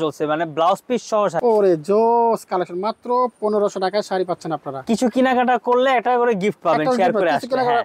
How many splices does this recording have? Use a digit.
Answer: 2